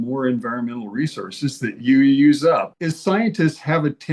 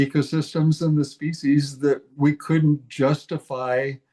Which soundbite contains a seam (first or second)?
first